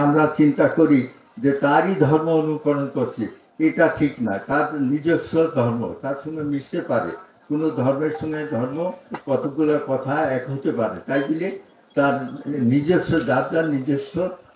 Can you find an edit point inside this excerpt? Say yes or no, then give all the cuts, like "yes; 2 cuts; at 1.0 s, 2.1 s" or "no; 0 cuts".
no; 0 cuts